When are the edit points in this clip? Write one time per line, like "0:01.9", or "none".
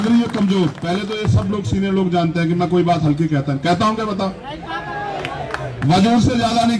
none